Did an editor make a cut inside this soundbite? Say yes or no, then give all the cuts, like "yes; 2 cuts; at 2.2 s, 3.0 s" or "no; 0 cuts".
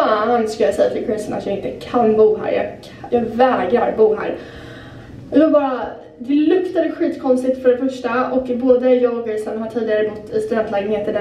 no; 0 cuts